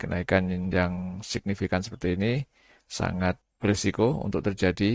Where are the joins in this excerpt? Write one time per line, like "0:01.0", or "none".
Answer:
0:03.5